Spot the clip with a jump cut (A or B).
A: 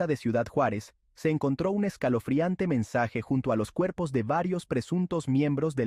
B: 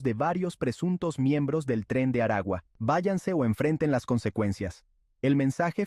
B